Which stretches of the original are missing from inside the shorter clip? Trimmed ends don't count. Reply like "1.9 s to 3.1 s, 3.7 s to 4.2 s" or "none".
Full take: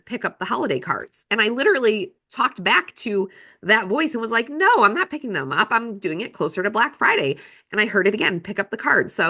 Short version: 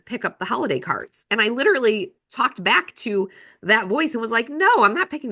none